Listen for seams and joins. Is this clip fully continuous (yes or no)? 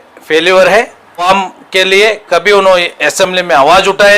no